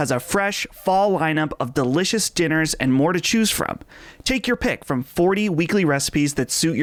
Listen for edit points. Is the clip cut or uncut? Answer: uncut